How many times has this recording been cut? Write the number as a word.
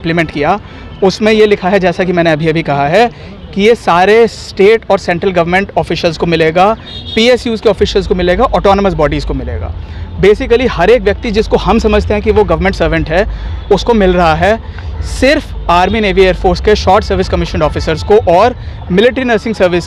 zero